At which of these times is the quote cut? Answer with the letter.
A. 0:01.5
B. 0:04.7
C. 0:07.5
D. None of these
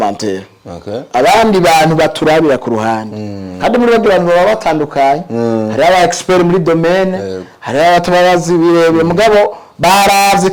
D